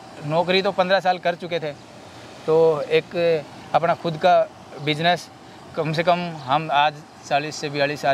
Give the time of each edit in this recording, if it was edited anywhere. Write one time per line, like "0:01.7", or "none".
none